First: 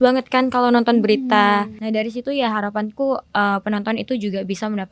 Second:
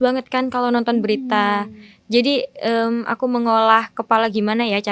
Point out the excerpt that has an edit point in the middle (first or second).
first